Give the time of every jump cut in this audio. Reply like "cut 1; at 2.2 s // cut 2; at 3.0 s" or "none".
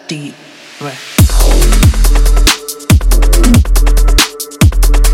cut 1; at 1.1 s